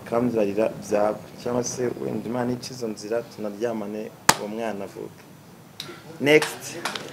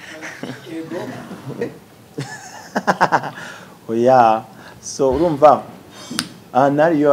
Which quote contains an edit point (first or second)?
second